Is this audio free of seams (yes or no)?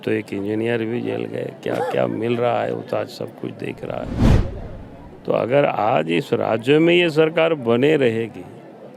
yes